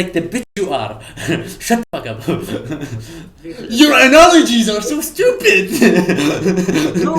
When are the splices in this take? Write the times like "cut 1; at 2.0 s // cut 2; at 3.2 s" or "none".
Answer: cut 1; at 3.5 s